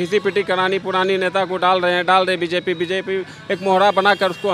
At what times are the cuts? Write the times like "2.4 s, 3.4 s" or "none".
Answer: none